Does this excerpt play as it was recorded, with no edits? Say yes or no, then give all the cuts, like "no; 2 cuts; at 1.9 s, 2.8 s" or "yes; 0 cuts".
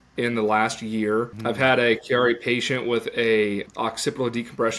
no; 2 cuts; at 1.3 s, 3.7 s